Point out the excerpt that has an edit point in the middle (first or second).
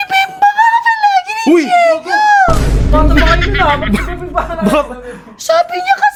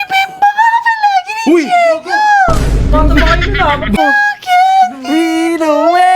second